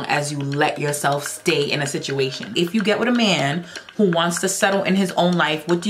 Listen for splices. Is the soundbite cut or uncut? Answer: cut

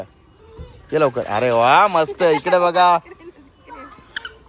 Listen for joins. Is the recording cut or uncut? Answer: uncut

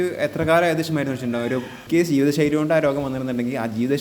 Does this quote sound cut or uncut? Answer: cut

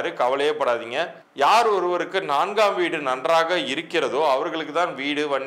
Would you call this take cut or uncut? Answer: cut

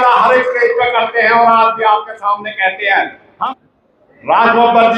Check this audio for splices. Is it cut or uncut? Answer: cut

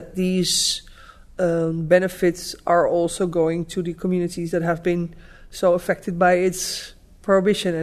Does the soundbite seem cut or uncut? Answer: uncut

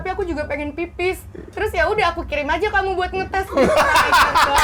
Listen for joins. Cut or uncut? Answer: uncut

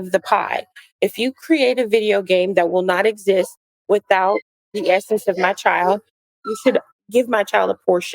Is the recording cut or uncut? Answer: cut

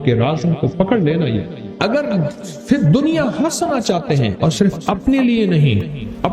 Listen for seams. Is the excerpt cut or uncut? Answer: cut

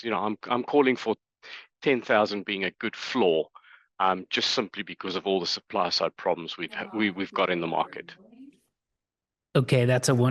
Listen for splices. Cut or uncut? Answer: uncut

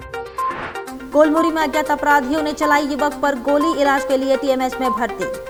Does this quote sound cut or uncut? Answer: uncut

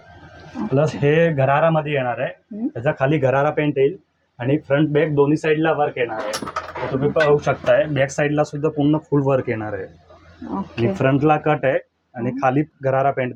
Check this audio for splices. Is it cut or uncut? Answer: uncut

